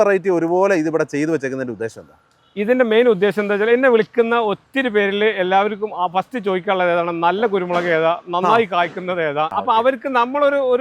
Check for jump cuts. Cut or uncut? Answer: uncut